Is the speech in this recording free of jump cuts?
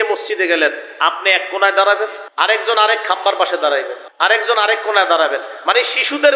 no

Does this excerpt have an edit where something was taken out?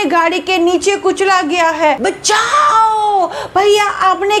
yes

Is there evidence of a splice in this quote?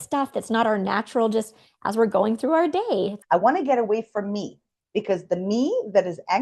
yes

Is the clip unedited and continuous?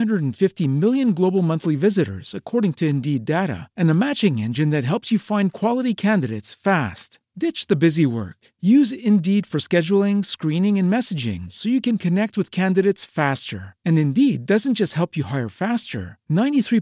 yes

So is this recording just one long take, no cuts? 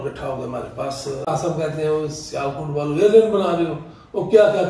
no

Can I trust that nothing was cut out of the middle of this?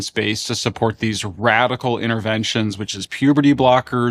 yes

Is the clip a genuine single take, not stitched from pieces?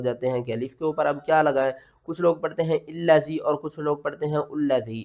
yes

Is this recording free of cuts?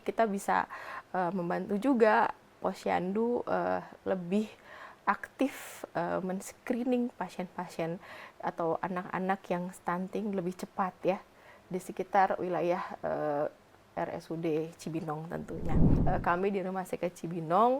no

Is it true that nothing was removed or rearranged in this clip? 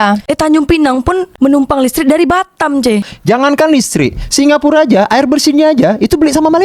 no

